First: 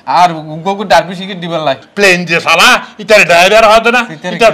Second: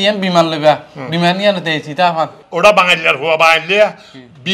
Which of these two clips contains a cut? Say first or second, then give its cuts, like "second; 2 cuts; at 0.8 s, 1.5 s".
first; 1 cut; at 1.8 s